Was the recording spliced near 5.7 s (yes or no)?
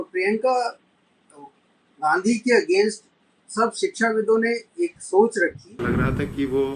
yes